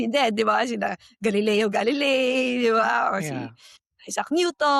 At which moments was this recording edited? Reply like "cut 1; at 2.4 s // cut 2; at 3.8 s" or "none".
none